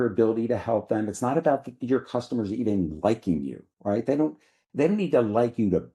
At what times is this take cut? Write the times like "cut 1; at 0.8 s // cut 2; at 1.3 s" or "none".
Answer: none